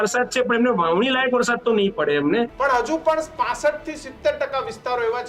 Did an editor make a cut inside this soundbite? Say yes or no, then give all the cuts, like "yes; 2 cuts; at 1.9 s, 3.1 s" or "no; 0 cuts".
yes; 1 cut; at 2.5 s